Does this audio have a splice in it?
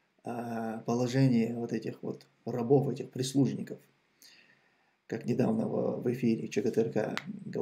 no; 0 cuts

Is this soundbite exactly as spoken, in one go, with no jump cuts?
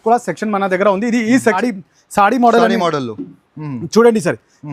no; 1 cut; at 1.5 s

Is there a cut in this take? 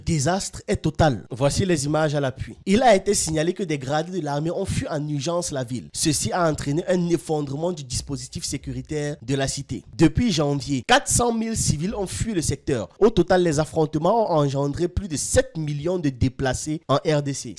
yes; 2 cuts; at 2.5 s, 9.9 s

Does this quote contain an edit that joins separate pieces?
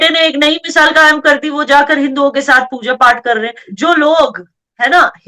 yes; 1 cut; at 3.7 s

